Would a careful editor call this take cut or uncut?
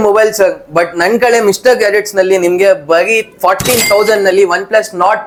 uncut